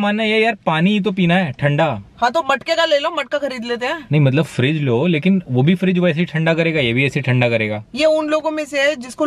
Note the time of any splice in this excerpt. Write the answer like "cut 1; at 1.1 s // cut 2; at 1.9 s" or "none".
none